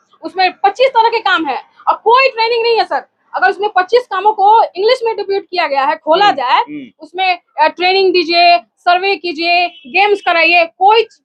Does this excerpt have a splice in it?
no; 0 cuts

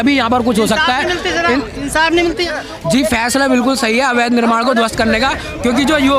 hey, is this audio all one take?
yes; 0 cuts

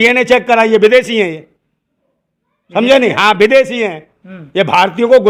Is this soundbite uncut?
yes; 0 cuts

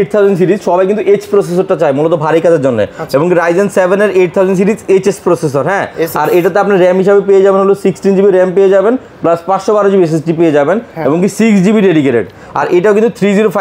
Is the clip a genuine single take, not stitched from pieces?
yes; 0 cuts

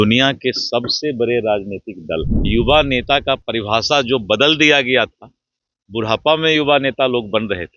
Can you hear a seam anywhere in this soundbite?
yes; 1 cut; at 2.3 s

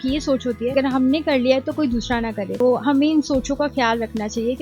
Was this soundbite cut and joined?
no; 0 cuts

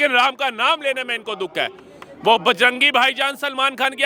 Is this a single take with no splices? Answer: yes; 0 cuts

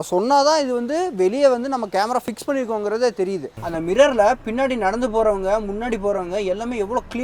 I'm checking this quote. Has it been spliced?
yes; 1 cut; at 3.5 s

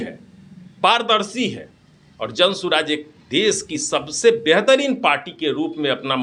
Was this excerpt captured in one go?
yes; 0 cuts

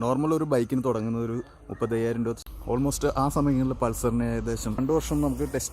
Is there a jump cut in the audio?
yes; 2 cuts; at 2.4 s, 4.8 s

